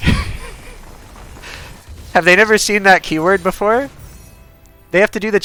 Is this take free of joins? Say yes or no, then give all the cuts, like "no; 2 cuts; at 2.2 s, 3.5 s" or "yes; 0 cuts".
yes; 0 cuts